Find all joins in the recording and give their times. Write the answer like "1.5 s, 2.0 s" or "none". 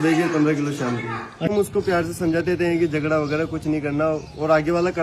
1.5 s